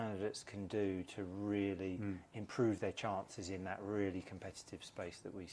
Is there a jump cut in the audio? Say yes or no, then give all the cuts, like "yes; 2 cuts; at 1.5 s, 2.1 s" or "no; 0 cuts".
no; 0 cuts